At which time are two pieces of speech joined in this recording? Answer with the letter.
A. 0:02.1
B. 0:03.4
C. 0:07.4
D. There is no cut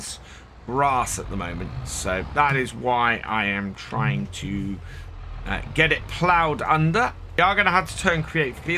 C